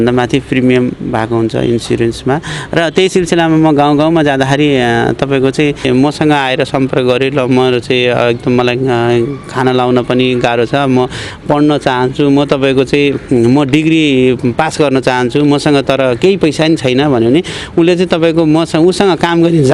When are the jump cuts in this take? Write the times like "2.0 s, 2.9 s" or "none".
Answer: 5.8 s